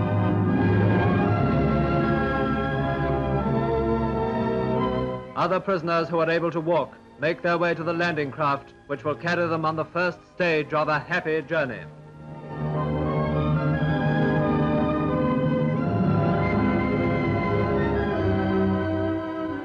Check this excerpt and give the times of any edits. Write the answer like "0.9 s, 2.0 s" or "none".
13.3 s